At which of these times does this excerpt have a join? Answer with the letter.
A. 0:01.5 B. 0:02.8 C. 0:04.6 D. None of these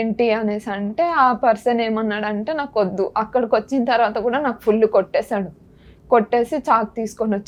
D